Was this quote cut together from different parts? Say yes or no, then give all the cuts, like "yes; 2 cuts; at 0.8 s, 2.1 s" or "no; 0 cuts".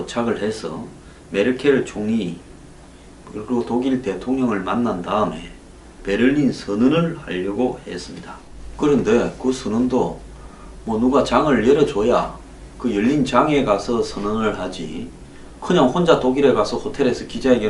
no; 0 cuts